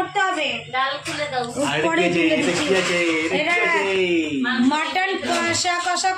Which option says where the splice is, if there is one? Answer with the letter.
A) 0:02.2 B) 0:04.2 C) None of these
C